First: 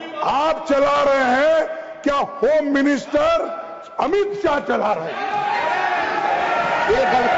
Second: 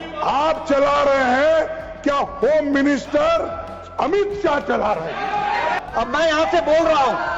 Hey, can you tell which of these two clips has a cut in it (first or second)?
second